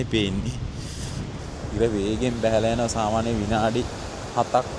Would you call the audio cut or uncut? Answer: cut